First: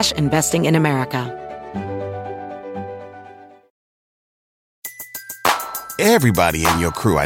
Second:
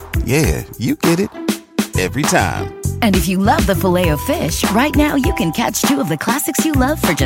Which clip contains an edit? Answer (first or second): first